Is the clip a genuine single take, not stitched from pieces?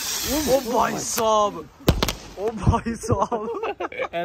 yes; 0 cuts

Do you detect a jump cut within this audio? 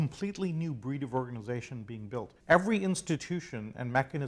yes; 1 cut; at 2.3 s

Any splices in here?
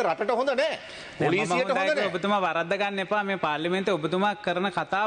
no; 0 cuts

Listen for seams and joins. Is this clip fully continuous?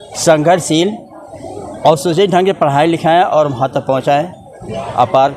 yes; 0 cuts

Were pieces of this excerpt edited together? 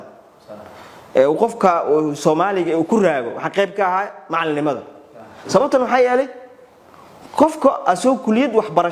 no; 0 cuts

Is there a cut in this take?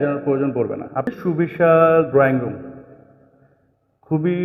yes; 1 cut; at 1.1 s

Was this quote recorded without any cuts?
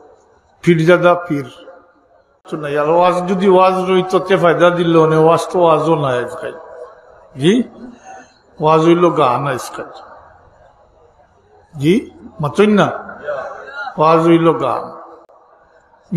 no; 1 cut; at 2.5 s

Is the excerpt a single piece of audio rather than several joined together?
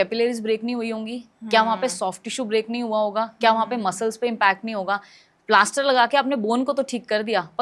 yes; 0 cuts

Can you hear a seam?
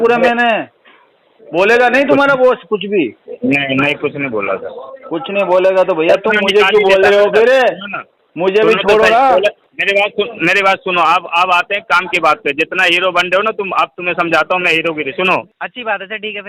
yes; 2 cuts; at 9.7 s, 15.6 s

